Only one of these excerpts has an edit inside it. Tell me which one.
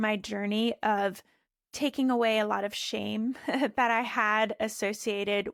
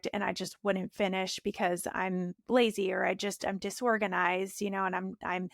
second; 1 cut; at 2.4 s

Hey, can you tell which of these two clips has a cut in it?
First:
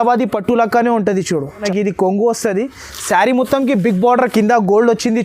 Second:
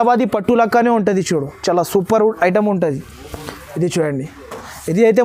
first; 1 cut; at 1.6 s

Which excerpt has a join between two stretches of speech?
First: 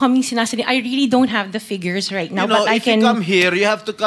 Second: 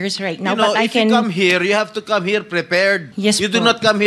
second; 1 cut; at 3.1 s

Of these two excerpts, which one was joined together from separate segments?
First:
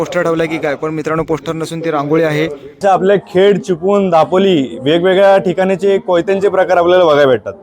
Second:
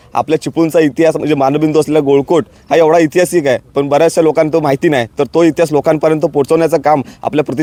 first; 1 cut; at 2.8 s

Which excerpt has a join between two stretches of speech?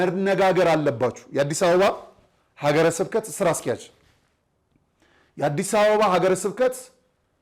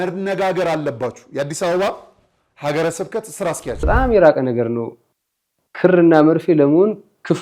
second; 1 cut; at 3.8 s

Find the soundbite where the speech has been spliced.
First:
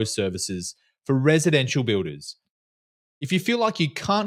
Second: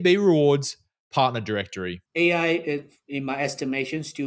second; 1 cut; at 2.0 s

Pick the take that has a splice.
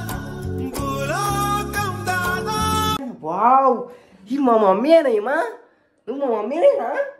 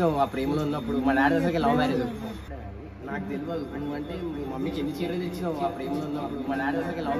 first; 1 cut; at 3.0 s

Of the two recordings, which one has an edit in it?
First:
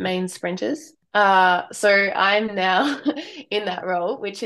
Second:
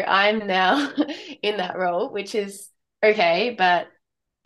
first; 1 cut; at 1.0 s

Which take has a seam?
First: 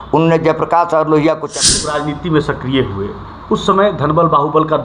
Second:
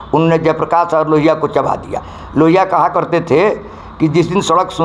first; 1 cut; at 1.8 s

